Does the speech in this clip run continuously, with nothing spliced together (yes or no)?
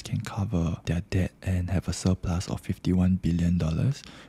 no